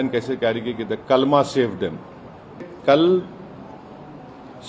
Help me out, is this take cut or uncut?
cut